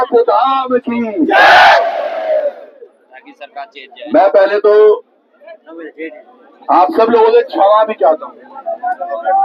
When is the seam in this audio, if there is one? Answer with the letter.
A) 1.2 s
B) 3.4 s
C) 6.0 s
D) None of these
D